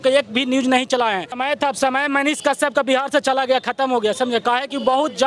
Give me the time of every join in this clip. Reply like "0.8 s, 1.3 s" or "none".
1.4 s

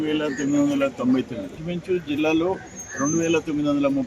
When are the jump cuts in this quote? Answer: 1.6 s

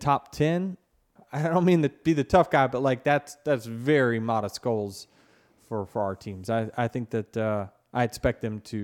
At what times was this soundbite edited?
1.2 s

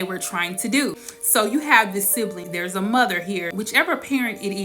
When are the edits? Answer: 1.0 s, 2.4 s, 3.5 s

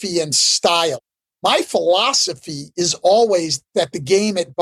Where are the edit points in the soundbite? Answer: 1.0 s

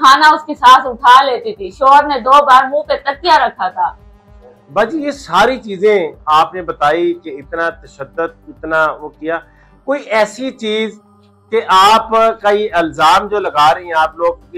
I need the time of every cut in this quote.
none

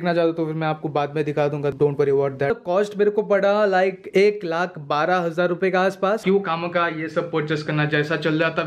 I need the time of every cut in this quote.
2.6 s, 6.2 s

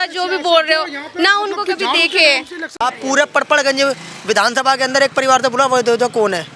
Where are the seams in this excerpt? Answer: 2.8 s

